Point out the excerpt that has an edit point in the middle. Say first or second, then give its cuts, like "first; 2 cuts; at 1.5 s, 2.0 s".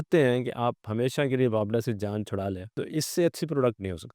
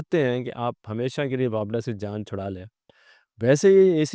first; 1 cut; at 2.8 s